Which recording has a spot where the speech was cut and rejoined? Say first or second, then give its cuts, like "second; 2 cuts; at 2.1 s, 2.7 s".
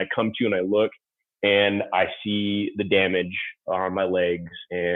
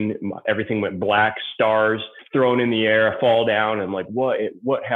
second; 1 cut; at 2.1 s